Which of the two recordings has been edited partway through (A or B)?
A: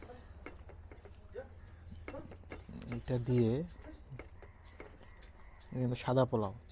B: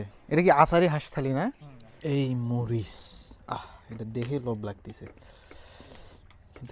B